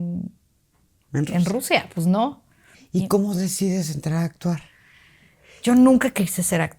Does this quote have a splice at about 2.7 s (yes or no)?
yes